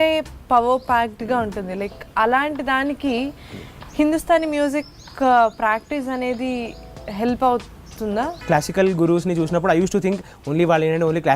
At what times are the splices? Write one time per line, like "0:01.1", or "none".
0:08.4